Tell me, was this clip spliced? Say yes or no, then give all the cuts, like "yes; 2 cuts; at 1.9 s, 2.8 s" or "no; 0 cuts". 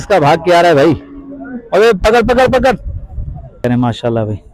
yes; 1 cut; at 3.6 s